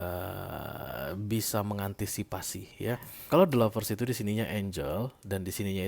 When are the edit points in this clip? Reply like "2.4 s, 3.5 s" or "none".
3.1 s